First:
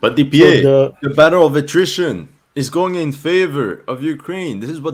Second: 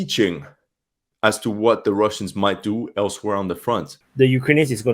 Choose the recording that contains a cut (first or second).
second